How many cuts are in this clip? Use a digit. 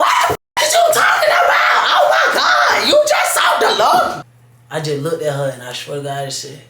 1